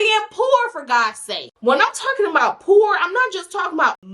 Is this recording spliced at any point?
yes; 1 cut; at 1.5 s

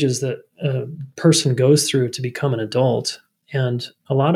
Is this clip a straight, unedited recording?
yes; 0 cuts

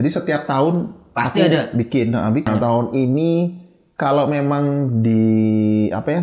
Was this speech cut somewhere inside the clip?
yes; 1 cut; at 2.5 s

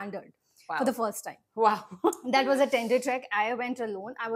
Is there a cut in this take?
no; 0 cuts

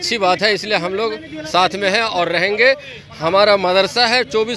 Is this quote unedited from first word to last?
yes; 0 cuts

